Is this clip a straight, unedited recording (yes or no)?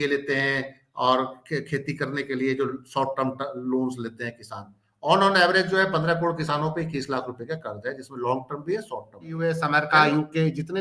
no